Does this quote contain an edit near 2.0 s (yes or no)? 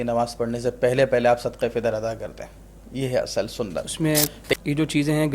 no